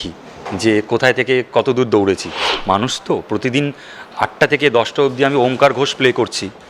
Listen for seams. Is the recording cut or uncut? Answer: cut